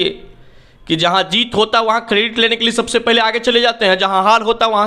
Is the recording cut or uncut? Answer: uncut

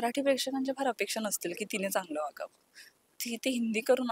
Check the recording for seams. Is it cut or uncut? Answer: uncut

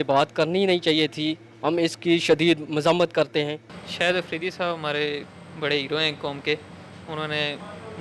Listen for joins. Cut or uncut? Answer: uncut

